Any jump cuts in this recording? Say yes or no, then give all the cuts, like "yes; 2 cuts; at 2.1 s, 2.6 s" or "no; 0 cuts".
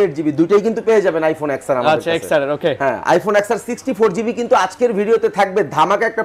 no; 0 cuts